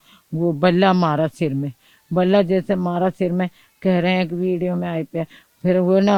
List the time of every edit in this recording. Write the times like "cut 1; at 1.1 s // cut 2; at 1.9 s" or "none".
none